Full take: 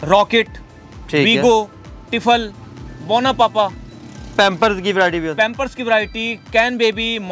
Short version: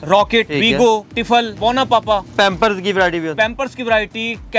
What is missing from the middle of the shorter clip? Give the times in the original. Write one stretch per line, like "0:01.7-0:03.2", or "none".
0:01.0-0:02.5
0:03.8-0:04.3